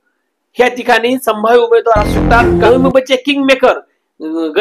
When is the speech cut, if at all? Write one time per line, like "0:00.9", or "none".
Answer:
0:02.5